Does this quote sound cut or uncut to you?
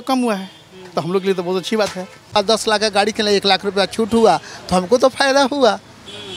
cut